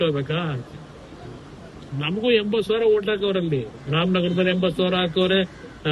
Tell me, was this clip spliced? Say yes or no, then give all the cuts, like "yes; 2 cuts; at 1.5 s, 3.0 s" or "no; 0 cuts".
no; 0 cuts